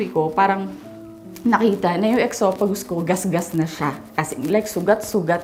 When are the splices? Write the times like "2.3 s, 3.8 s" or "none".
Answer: none